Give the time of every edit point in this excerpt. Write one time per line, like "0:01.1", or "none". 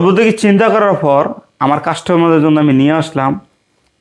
none